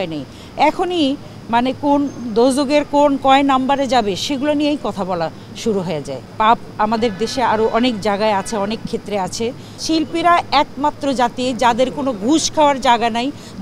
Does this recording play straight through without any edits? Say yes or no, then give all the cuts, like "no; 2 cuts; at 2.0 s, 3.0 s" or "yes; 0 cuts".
no; 2 cuts; at 6.3 s, 9.8 s